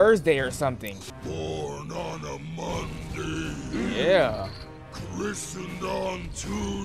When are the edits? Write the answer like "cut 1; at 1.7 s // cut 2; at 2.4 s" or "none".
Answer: cut 1; at 1.0 s